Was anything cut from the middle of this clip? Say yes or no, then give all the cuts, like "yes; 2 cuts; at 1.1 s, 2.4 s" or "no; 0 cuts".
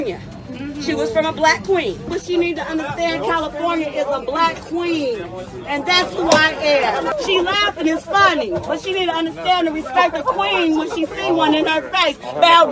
yes; 2 cuts; at 2.1 s, 7.1 s